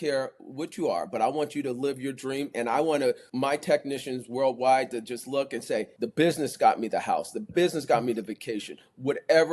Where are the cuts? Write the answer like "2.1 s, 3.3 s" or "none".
3.3 s, 6.0 s

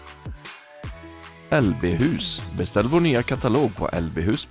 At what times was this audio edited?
1.5 s

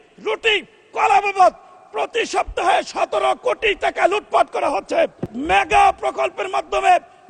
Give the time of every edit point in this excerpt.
5.3 s

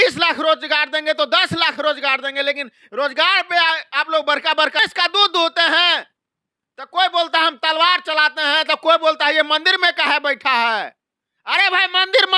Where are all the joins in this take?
4.8 s

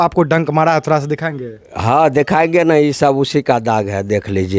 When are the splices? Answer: none

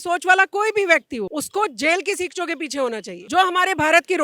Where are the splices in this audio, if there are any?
1.3 s, 3.1 s

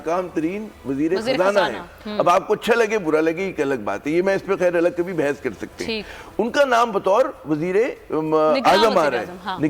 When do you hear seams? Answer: none

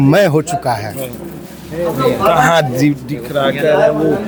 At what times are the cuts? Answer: none

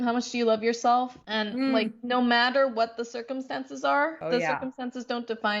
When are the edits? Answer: 1.2 s, 4.2 s

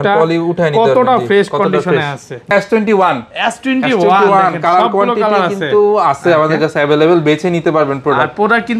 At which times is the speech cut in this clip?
2.5 s

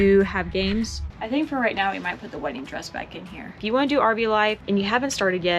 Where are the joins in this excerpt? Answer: 1.0 s, 3.6 s

